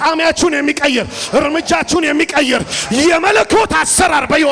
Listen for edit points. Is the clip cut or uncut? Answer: uncut